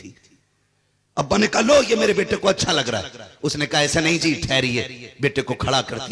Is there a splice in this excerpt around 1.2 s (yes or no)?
no